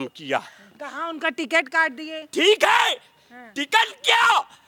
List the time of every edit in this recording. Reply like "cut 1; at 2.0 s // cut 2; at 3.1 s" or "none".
none